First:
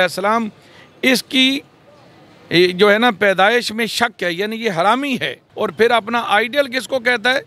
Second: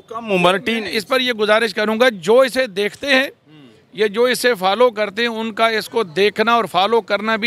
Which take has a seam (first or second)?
first